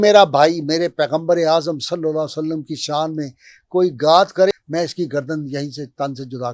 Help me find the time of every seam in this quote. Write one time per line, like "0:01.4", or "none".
0:04.5